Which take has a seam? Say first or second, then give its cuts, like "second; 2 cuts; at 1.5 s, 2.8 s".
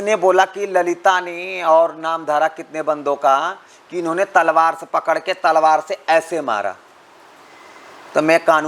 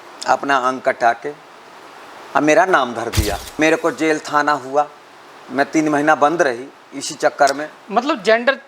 second; 1 cut; at 3.5 s